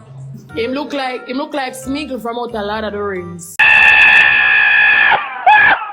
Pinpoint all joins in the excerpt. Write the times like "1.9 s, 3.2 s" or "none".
3.4 s